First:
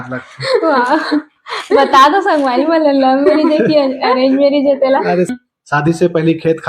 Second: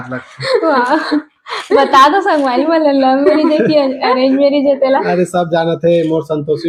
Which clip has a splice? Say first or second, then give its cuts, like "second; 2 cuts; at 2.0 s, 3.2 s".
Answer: first; 1 cut; at 5.3 s